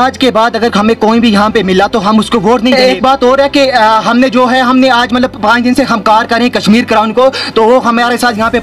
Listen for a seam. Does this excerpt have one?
yes; 1 cut; at 2.7 s

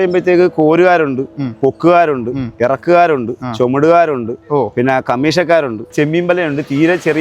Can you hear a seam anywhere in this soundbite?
yes; 1 cut; at 5.9 s

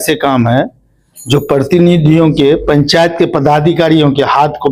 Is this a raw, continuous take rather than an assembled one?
yes; 0 cuts

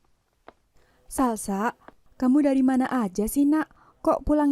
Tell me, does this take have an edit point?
no; 0 cuts

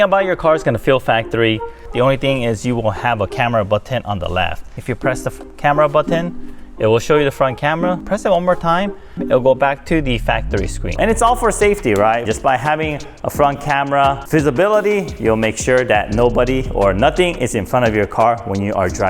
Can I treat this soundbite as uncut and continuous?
no; 4 cuts; at 1.9 s, 4.8 s, 8.0 s, 10.9 s

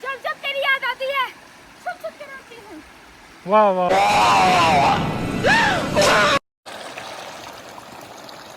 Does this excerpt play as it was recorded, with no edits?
yes; 0 cuts

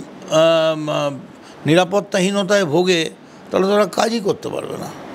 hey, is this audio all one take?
yes; 0 cuts

